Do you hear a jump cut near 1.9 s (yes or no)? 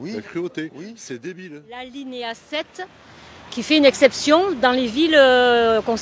yes